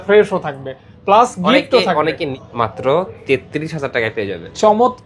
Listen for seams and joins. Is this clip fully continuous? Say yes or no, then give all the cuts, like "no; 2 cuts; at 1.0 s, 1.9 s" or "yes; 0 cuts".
no; 1 cut; at 2.4 s